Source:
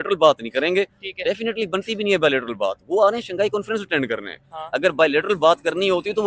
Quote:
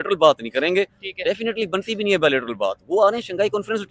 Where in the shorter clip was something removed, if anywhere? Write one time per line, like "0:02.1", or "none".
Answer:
none